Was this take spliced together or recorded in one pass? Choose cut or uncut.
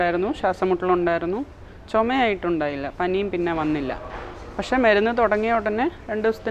uncut